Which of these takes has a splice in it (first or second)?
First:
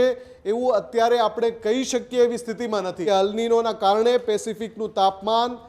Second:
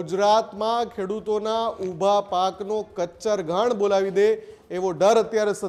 first